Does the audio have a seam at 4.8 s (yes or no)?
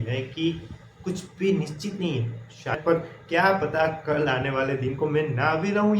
no